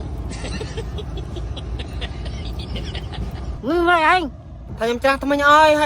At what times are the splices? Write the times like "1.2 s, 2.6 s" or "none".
3.5 s